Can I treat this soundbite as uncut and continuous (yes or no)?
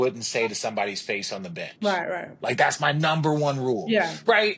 yes